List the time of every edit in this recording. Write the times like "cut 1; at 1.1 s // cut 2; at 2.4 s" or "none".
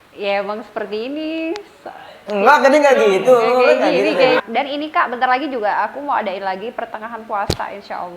cut 1; at 4.4 s